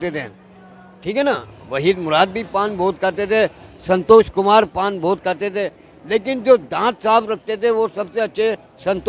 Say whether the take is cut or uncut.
uncut